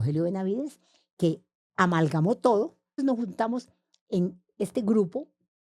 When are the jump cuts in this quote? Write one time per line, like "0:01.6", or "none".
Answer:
0:01.5
0:03.0